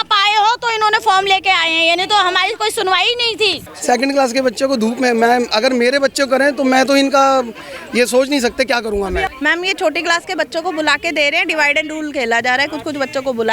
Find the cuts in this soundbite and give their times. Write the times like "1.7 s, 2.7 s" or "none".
3.7 s, 9.3 s